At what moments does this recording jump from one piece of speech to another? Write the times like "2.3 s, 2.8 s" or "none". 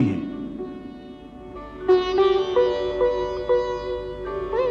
none